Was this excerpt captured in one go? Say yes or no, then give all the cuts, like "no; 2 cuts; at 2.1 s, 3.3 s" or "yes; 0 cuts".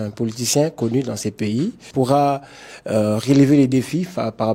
no; 1 cut; at 1.8 s